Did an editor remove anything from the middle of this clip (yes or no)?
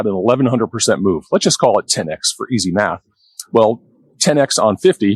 no